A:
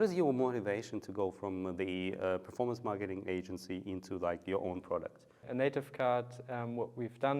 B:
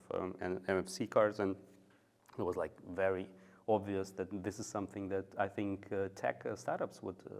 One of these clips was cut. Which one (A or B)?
A